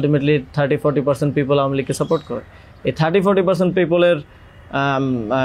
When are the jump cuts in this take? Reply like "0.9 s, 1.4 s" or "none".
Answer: none

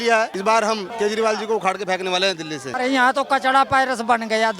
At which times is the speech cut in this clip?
0.8 s, 2.6 s

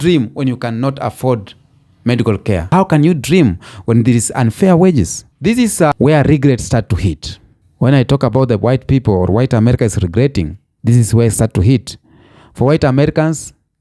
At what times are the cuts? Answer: 2.6 s, 5.2 s

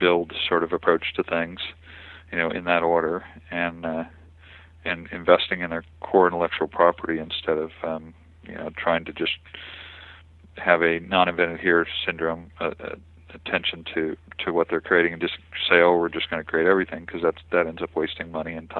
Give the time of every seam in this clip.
none

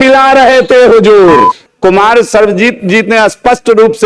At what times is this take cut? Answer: 1.7 s

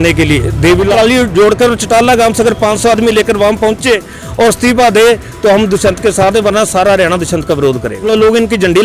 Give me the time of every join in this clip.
0.9 s, 8.0 s

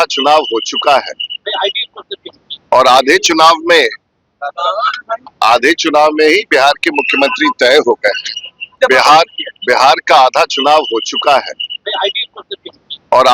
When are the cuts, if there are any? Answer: 8.7 s

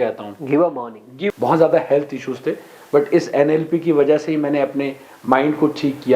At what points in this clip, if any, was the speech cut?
1.3 s

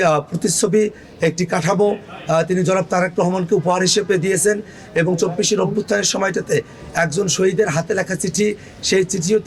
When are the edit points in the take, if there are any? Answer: none

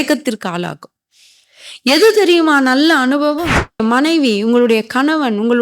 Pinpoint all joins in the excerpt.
3.8 s

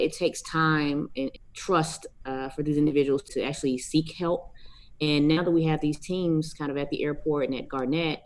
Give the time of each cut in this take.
1.2 s, 3.3 s

